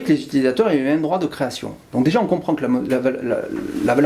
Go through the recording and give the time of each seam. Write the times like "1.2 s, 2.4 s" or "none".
none